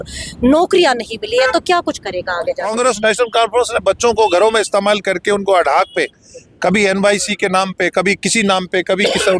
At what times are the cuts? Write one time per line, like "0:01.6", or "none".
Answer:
0:02.7